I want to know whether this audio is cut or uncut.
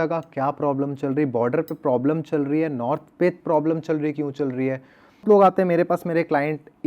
cut